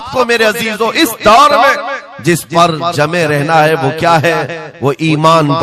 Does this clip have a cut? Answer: no; 0 cuts

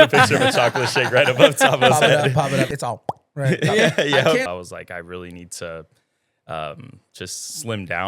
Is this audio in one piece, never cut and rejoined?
no; 2 cuts; at 2.7 s, 4.5 s

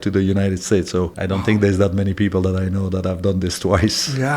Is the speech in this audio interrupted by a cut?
yes; 1 cut; at 1.2 s

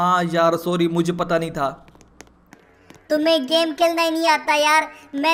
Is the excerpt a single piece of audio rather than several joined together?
yes; 0 cuts

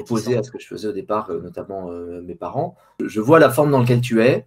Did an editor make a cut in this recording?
yes; 1 cut; at 2.8 s

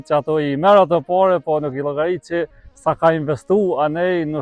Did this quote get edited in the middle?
no; 0 cuts

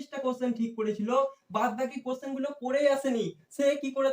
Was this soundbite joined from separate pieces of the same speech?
no; 0 cuts

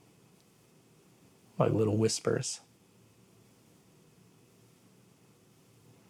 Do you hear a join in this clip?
no; 0 cuts

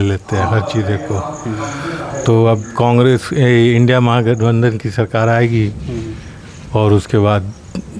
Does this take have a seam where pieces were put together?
no; 0 cuts

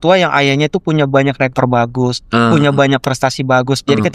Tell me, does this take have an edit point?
no; 0 cuts

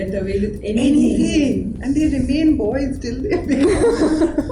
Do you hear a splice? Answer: no; 0 cuts

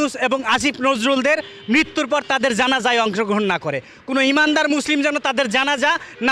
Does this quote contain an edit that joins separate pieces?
no; 0 cuts

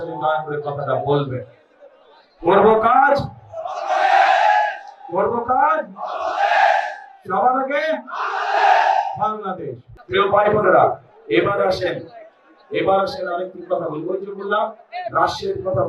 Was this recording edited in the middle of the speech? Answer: yes; 1 cut; at 9.9 s

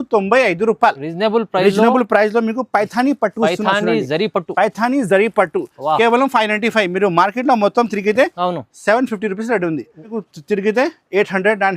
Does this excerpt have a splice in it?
yes; 1 cut; at 10.1 s

